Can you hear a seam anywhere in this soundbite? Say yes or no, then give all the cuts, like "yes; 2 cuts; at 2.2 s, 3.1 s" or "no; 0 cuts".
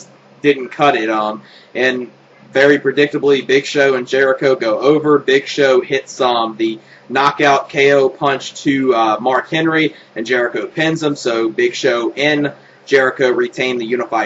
no; 0 cuts